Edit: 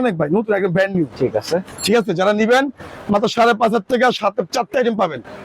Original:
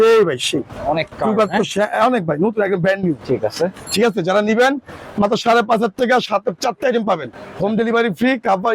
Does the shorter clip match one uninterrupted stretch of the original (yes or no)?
yes